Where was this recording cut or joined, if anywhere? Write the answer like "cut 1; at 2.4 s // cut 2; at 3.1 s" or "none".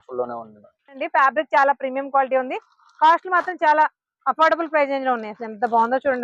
cut 1; at 1.0 s